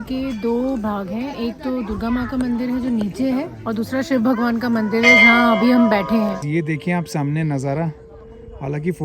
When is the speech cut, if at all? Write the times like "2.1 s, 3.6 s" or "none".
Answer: 6.4 s